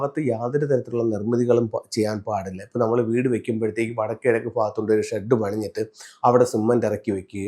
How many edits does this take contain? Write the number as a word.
zero